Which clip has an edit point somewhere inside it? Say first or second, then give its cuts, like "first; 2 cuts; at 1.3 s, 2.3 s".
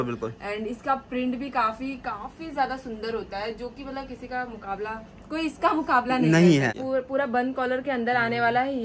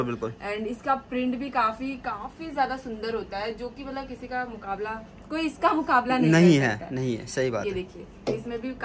first; 1 cut; at 6.8 s